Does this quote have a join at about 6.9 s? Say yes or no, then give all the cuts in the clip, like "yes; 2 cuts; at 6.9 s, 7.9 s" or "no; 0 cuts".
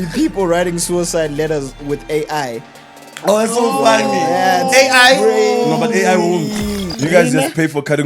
yes; 1 cut; at 6.9 s